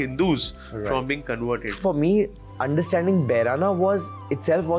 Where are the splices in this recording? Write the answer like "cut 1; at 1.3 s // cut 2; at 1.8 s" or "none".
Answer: cut 1; at 1.8 s